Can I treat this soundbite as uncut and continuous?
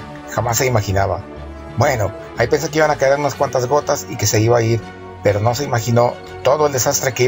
yes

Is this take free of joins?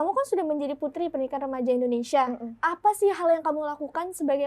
yes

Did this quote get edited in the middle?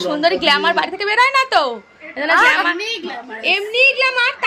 no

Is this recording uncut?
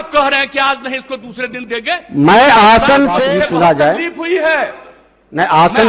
no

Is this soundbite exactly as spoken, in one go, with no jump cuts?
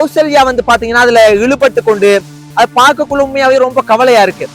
yes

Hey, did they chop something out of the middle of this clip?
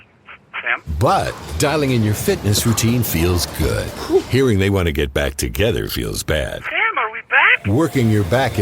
no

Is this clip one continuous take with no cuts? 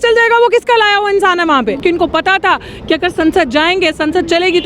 no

